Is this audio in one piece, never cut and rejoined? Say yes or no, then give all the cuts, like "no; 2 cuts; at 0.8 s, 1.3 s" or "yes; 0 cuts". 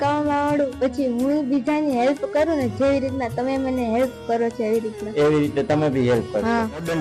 yes; 0 cuts